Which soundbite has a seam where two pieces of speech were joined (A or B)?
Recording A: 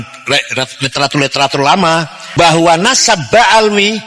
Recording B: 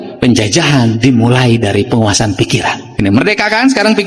A